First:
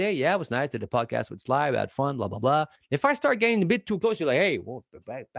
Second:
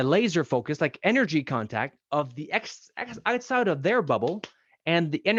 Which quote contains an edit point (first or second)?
first